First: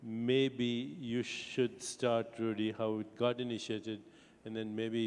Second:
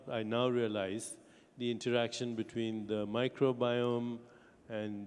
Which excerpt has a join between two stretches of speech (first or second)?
second